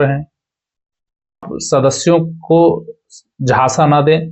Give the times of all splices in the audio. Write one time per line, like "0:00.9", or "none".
0:01.5